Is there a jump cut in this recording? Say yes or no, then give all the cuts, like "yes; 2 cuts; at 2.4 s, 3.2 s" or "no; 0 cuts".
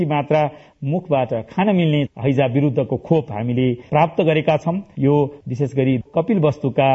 no; 0 cuts